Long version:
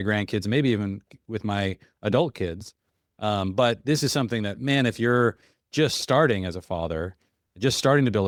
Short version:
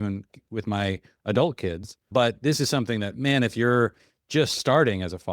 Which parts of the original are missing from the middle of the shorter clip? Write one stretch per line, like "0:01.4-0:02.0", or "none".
0:02.8-0:03.5